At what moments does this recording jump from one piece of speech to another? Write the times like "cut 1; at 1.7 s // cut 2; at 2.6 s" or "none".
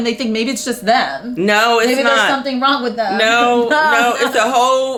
none